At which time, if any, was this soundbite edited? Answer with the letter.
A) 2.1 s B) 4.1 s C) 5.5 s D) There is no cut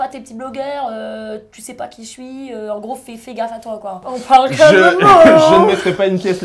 B